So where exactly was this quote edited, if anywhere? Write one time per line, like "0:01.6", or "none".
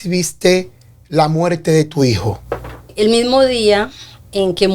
0:02.9